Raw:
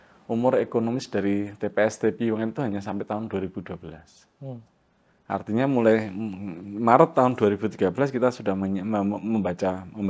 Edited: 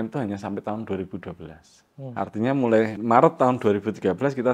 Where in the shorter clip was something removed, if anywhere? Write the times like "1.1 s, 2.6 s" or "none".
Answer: 2.1 s, 3.0 s